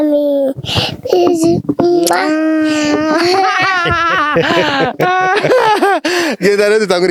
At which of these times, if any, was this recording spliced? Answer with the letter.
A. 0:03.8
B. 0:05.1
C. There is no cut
C